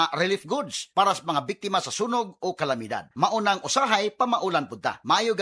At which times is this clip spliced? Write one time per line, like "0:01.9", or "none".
none

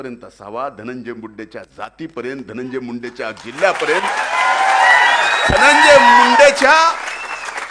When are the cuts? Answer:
none

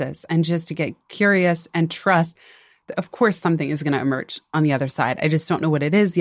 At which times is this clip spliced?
0:02.3

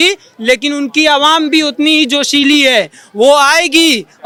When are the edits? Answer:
none

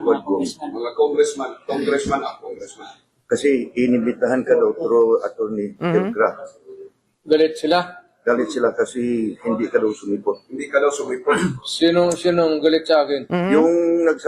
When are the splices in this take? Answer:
none

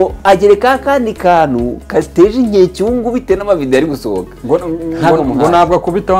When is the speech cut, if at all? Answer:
0:04.3

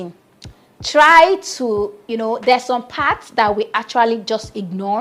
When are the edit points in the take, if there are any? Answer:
none

